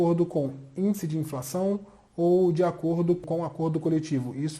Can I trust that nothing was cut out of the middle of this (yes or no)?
no